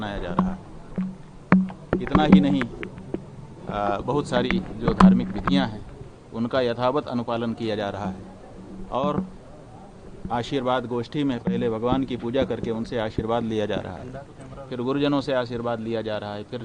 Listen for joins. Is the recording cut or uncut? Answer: uncut